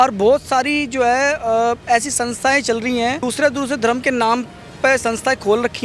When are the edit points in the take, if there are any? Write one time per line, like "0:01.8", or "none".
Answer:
0:03.2

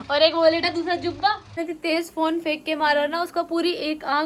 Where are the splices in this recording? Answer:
0:01.6

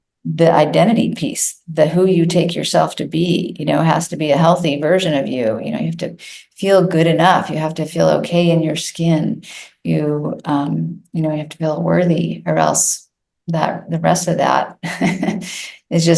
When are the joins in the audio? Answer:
none

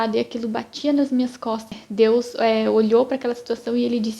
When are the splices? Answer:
0:01.8

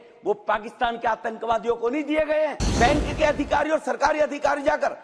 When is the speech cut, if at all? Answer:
0:02.6

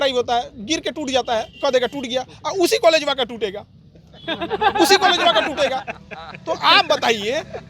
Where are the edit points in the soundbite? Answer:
none

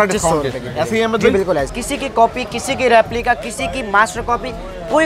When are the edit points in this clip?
0:01.7

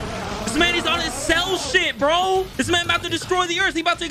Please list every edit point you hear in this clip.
0:02.5

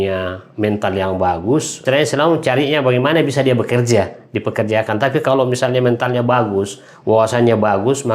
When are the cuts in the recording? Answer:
0:01.8

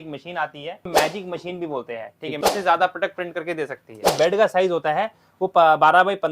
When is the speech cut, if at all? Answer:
0:00.9
0:02.4
0:04.1

